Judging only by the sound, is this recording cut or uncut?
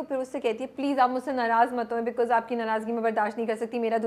uncut